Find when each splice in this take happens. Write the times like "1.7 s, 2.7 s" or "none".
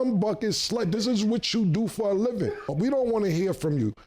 2.7 s